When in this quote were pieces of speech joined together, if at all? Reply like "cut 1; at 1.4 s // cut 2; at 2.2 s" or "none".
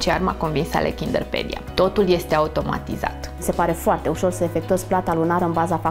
cut 1; at 1.6 s // cut 2; at 3.4 s

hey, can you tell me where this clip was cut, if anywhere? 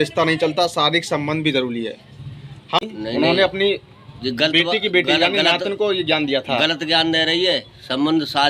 cut 1; at 2.8 s

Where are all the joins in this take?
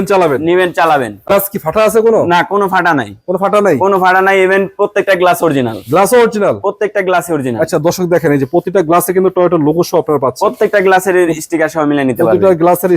cut 1; at 1.3 s

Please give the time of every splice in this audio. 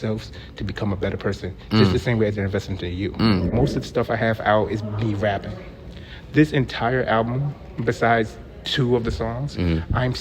cut 1; at 3.5 s

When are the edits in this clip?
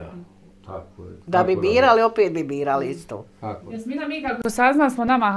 cut 1; at 3.6 s

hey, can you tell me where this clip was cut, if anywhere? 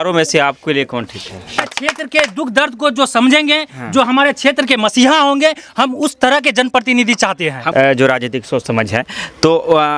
cut 1; at 1.6 s // cut 2; at 7.6 s

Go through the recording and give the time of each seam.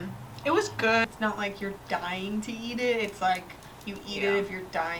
cut 1; at 1.0 s

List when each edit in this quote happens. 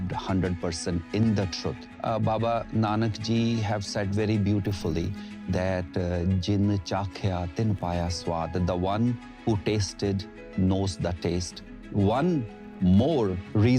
cut 1; at 1.9 s // cut 2; at 11.8 s

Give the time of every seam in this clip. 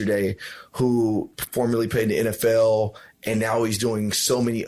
none

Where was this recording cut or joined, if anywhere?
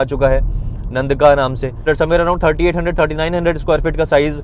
cut 1; at 1.8 s

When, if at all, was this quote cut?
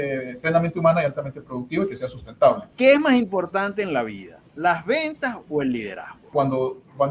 cut 1; at 2.7 s // cut 2; at 6.3 s

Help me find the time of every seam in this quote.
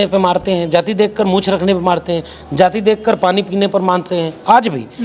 none

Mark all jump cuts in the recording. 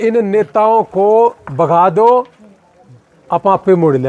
none

